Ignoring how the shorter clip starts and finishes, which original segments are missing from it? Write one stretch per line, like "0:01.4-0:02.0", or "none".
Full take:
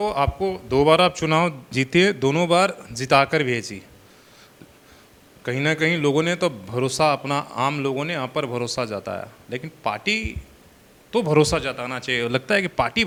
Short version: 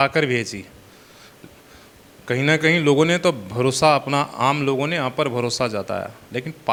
none